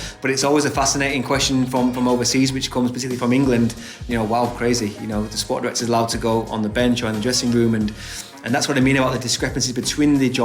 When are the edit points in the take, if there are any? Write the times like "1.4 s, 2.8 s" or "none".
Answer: none